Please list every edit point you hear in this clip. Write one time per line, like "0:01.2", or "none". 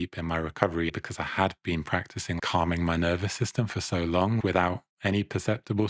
0:00.9
0:02.4
0:04.4